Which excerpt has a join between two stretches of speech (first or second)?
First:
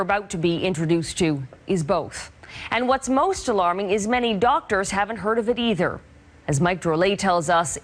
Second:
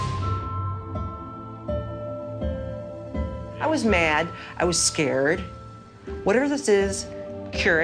second